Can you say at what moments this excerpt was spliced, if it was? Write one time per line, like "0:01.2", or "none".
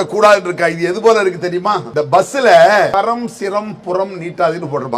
0:01.9
0:02.9